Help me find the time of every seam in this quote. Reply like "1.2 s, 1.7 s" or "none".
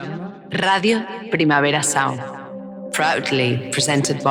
none